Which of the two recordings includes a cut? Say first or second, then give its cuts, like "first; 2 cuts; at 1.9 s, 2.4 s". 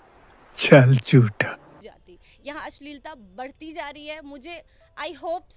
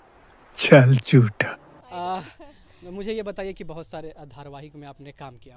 first; 1 cut; at 1.7 s